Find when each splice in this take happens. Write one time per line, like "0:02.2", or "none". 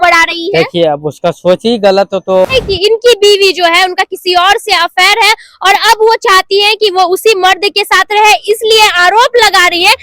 0:02.5